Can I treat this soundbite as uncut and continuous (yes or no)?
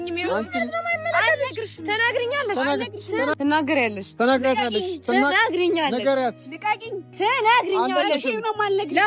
yes